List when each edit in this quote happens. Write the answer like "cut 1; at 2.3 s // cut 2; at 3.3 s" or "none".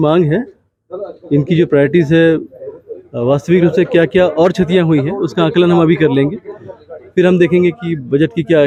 none